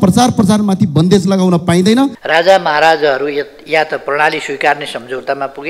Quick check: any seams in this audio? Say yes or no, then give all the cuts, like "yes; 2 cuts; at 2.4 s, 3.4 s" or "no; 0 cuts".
yes; 1 cut; at 2.2 s